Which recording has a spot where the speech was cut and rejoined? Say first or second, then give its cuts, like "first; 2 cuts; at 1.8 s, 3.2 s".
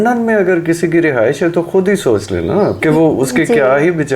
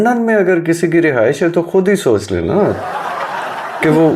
first; 1 cut; at 2.8 s